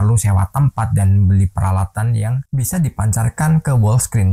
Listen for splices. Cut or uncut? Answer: cut